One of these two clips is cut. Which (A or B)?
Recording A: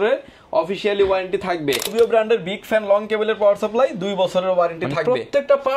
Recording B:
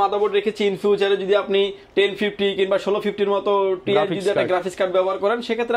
A